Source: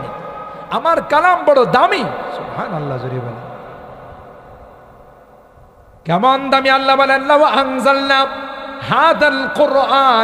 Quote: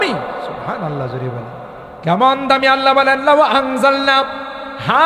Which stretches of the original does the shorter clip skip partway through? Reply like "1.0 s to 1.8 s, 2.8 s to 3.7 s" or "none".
3.8 s to 5.9 s